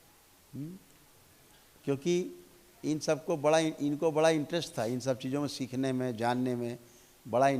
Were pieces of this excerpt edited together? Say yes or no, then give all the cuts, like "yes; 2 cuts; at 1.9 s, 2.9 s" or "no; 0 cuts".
no; 0 cuts